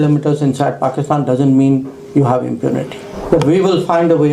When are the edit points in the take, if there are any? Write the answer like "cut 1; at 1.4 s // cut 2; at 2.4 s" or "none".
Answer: cut 1; at 3.1 s